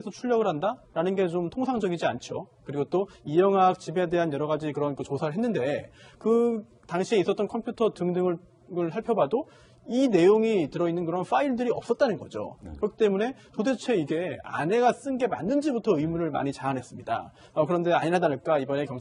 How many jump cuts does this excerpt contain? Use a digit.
0